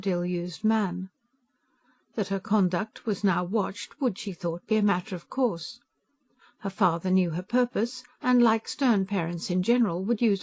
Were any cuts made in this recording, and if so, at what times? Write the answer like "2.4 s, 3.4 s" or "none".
none